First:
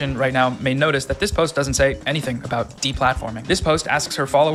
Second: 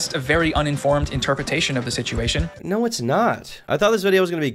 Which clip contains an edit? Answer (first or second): second